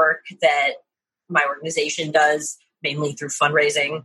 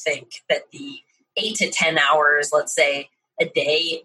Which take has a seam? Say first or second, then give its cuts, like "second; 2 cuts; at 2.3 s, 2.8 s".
second; 1 cut; at 1.2 s